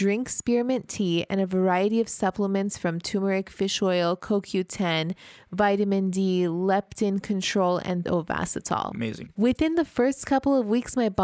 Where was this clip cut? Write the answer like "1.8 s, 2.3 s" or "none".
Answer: 8.0 s, 9.2 s

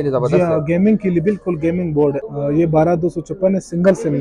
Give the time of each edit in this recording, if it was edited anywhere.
2.2 s

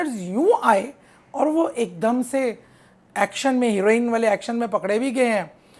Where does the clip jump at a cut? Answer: none

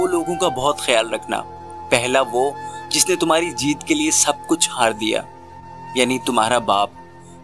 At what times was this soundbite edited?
none

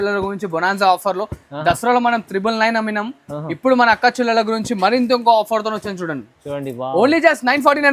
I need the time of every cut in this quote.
none

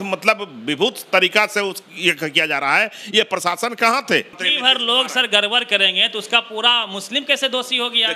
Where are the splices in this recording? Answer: 4.4 s

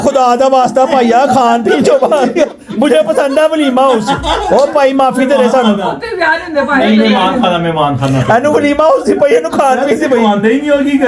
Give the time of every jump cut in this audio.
none

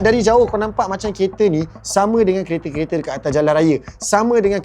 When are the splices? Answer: none

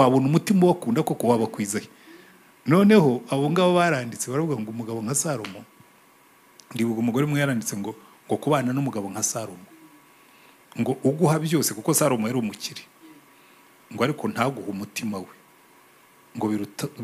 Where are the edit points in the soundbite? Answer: none

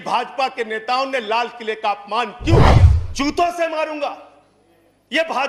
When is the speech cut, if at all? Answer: 2.7 s

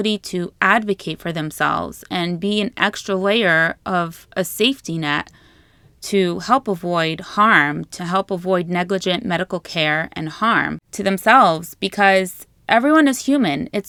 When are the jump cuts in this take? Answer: none

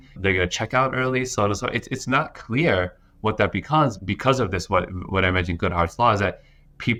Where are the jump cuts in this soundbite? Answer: none

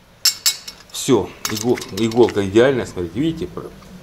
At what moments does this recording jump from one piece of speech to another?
none

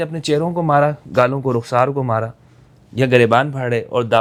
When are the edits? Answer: none

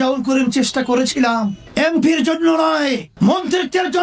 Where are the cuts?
1.6 s, 3.1 s

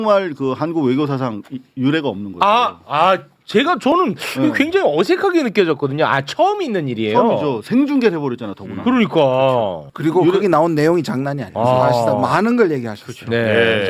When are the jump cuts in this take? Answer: 9.8 s, 11.4 s

